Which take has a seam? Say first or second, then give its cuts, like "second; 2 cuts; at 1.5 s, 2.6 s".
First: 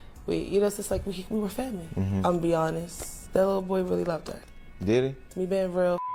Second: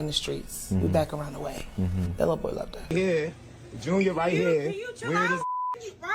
second; 1 cut; at 2.9 s